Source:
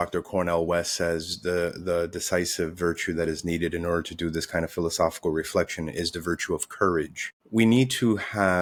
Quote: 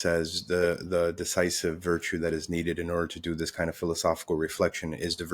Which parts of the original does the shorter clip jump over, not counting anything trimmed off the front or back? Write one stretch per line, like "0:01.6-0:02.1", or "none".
none